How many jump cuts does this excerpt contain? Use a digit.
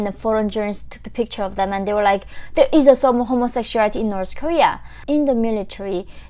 1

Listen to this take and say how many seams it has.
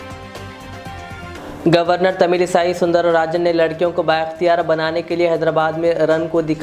1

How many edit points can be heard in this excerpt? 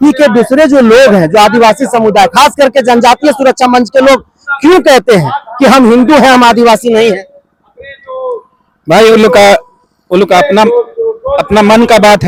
0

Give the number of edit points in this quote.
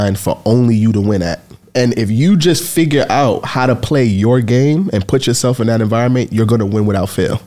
1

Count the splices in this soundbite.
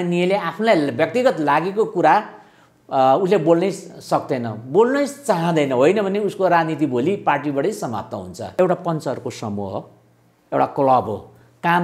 1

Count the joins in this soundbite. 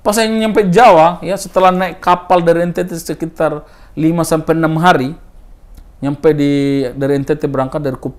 0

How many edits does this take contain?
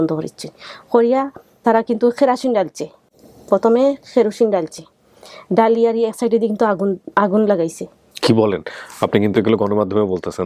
0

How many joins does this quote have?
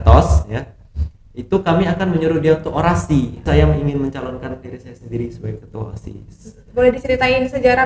1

